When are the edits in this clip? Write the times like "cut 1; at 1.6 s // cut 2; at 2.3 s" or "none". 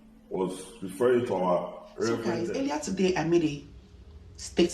cut 1; at 2.5 s